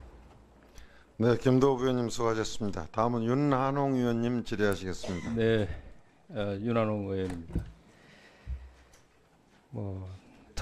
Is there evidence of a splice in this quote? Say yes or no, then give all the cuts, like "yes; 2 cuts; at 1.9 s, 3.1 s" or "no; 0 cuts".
no; 0 cuts